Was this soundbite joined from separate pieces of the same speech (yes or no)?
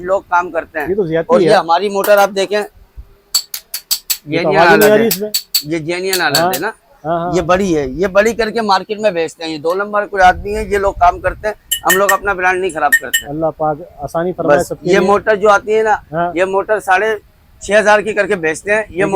no